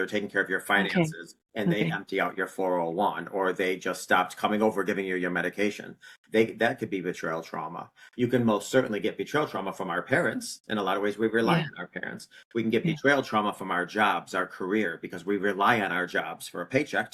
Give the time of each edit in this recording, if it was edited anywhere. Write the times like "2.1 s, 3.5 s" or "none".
none